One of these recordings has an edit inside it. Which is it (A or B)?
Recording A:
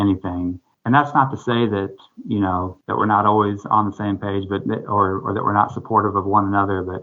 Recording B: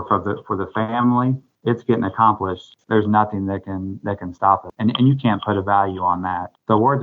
B